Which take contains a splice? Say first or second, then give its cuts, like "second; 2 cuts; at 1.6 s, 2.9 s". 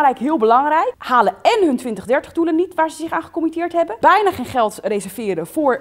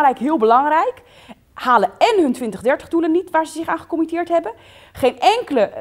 first; 2 cuts; at 1.0 s, 3.9 s